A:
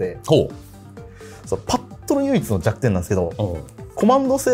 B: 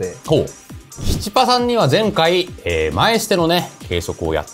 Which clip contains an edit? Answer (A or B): B